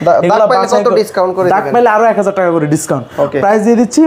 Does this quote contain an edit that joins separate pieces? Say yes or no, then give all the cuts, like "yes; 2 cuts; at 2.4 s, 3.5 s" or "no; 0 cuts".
no; 0 cuts